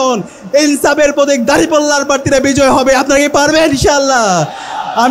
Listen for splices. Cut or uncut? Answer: uncut